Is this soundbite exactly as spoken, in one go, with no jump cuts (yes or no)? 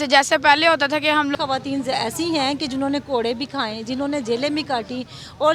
no